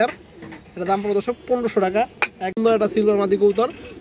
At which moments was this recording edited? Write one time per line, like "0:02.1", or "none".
0:02.6